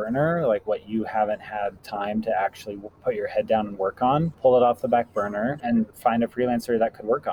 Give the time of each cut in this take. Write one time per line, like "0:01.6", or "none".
0:01.8
0:04.3
0:05.8